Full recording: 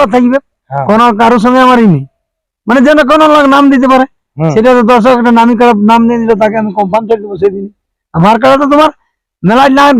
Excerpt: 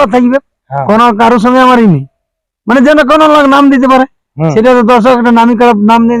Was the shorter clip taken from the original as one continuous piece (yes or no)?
yes